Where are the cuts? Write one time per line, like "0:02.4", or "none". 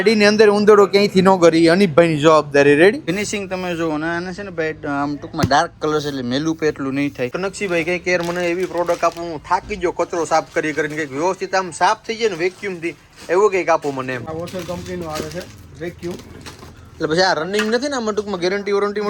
0:03.0
0:07.3
0:14.2